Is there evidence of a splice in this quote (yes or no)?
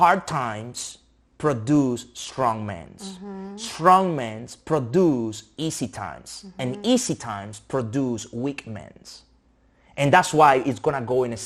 no